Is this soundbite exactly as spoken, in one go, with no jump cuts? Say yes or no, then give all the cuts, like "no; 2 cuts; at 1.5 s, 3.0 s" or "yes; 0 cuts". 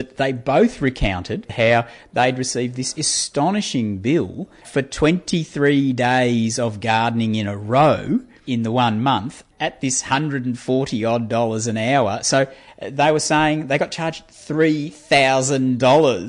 no; 4 cuts; at 1.5 s, 4.7 s, 8.4 s, 9.4 s